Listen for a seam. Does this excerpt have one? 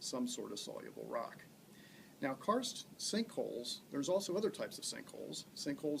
yes; 1 cut; at 2.0 s

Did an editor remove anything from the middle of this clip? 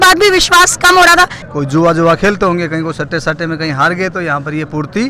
yes; 1 cut; at 1.4 s

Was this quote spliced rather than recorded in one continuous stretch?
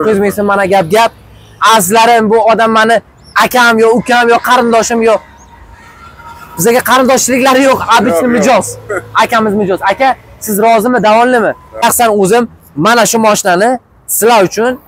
yes; 1 cut; at 11.8 s

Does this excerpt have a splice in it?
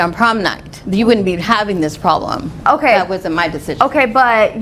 no; 0 cuts

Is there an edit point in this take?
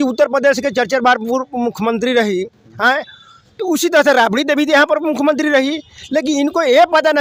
no; 0 cuts

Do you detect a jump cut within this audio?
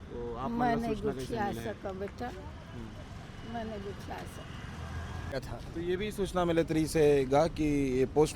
yes; 1 cut; at 5.3 s

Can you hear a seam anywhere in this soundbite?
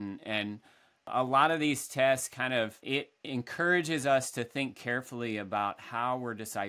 yes; 2 cuts; at 1.1 s, 2.8 s

